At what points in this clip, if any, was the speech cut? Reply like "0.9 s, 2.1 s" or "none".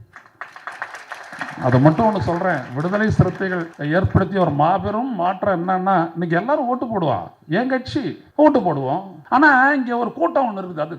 3.7 s, 8.2 s, 9.1 s